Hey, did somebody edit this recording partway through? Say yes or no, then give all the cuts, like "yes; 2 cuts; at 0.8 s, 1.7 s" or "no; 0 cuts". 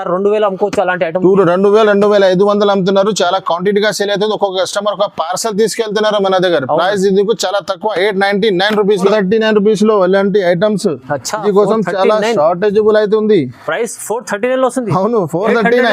yes; 1 cut; at 9.1 s